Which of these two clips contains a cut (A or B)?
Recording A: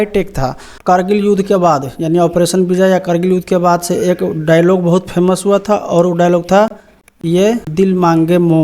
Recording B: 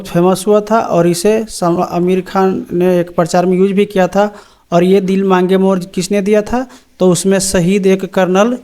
A